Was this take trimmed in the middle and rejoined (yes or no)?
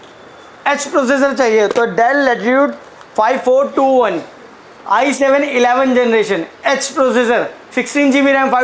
no